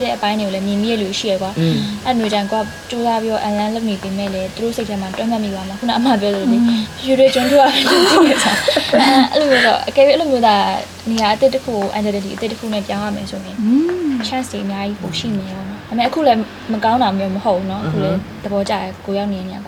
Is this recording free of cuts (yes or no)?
yes